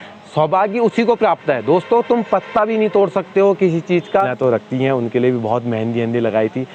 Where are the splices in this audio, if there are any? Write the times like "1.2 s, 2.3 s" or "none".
4.3 s